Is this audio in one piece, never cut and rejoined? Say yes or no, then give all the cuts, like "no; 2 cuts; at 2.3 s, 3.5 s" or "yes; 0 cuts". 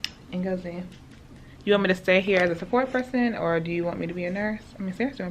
yes; 0 cuts